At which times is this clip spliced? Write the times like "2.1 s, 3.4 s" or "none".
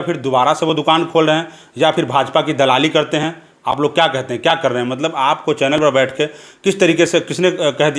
none